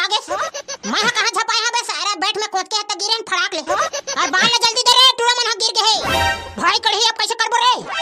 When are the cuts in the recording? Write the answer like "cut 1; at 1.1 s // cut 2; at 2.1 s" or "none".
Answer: none